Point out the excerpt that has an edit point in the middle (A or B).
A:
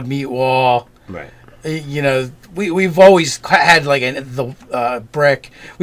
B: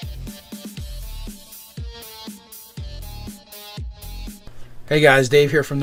A